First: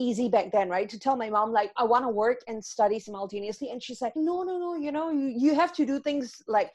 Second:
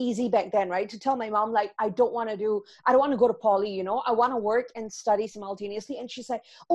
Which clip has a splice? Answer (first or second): first